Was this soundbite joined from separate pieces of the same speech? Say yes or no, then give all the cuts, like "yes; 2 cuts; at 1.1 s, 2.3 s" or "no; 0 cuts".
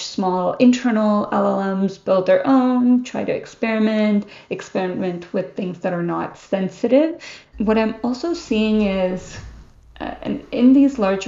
yes; 1 cut; at 7.5 s